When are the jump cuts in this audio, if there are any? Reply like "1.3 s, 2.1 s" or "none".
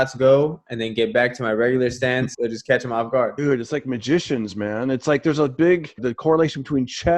2.3 s, 3.3 s, 6.0 s